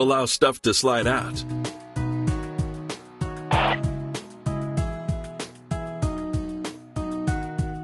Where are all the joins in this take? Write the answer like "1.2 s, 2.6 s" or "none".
none